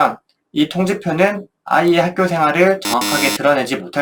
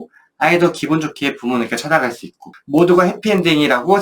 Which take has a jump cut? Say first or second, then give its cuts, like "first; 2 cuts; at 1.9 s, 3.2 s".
second; 1 cut; at 2.5 s